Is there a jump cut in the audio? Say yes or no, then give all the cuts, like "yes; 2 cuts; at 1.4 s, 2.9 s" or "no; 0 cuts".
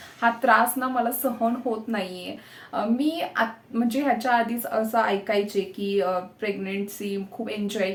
no; 0 cuts